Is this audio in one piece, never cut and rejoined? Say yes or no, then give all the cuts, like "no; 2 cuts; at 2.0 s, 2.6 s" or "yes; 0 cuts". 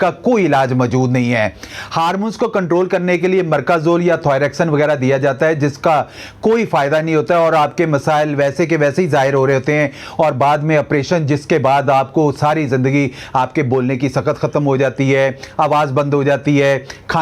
yes; 0 cuts